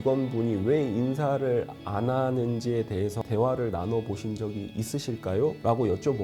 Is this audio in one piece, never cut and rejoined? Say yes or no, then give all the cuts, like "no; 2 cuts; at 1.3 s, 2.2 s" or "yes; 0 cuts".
yes; 0 cuts